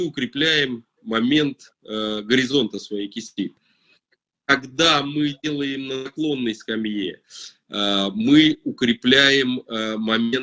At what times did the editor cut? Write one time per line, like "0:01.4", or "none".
0:03.8